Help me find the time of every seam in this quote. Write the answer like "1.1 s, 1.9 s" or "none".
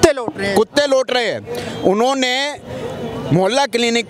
none